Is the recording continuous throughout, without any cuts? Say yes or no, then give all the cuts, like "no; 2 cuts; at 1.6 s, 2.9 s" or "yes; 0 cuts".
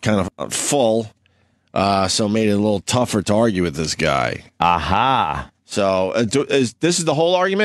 no; 1 cut; at 5.9 s